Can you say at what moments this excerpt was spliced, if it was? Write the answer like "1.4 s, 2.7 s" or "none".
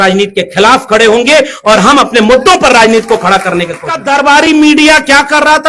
3.9 s